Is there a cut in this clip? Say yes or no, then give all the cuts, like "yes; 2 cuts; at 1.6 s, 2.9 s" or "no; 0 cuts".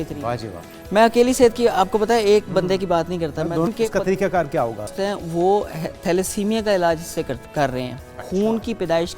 yes; 2 cuts; at 3.7 s, 4.9 s